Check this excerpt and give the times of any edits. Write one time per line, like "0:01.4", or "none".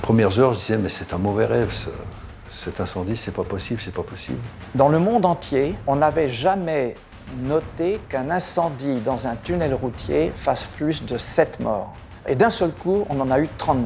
0:04.4
0:05.8
0:12.3